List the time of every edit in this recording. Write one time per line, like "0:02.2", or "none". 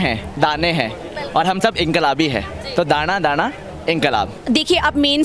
0:04.4